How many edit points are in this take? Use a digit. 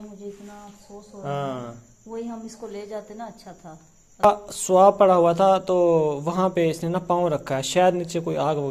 1